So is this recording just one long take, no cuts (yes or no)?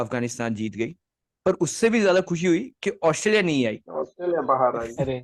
yes